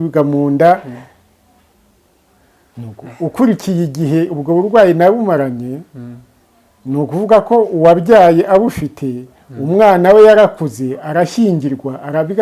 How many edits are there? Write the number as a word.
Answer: zero